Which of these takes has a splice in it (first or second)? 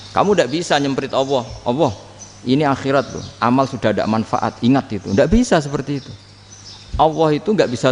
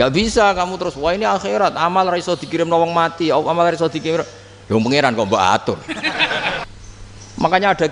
second